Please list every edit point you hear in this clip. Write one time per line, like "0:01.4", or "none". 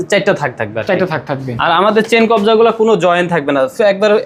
none